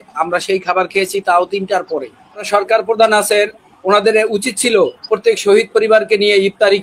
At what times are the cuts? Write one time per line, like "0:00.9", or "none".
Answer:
0:02.4